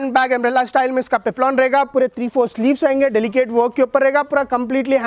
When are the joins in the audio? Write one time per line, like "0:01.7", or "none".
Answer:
none